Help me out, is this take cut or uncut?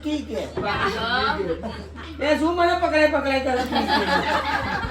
uncut